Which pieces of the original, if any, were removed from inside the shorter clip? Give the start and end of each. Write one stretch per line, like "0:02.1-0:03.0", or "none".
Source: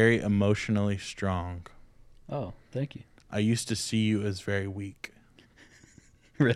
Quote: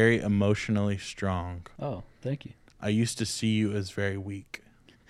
0:01.6-0:02.1